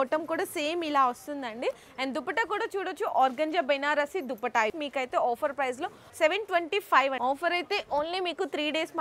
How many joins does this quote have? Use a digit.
2